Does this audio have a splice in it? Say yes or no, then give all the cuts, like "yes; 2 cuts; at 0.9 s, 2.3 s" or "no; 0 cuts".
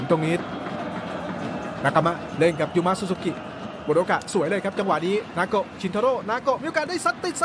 no; 0 cuts